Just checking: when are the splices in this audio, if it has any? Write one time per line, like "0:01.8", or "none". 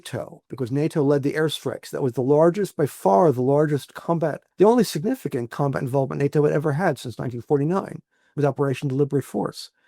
0:04.4